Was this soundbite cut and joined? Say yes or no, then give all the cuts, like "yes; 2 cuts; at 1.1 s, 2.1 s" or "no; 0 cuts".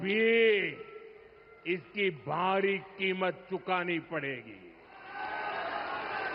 no; 0 cuts